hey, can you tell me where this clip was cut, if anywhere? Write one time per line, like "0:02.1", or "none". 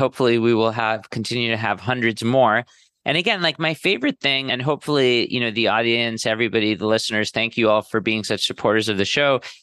0:04.5
0:07.9